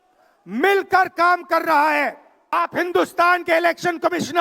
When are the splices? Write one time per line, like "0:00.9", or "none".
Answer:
0:02.5